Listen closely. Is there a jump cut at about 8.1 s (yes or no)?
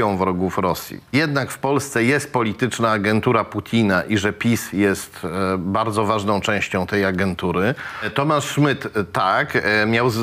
yes